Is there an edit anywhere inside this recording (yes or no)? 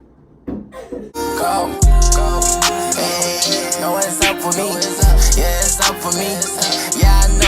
yes